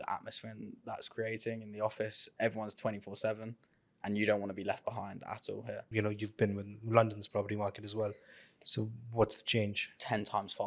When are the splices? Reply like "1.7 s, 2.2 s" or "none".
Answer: 5.8 s